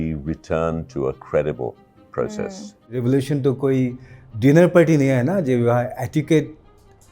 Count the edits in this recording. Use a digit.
1